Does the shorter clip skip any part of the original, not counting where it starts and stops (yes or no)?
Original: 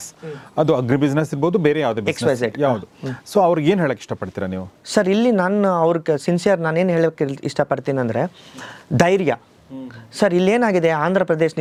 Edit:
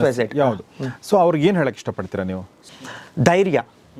yes